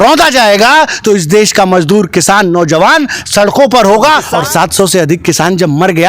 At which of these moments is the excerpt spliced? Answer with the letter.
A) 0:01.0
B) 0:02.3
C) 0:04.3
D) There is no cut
C